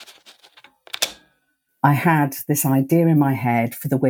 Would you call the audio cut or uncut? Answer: cut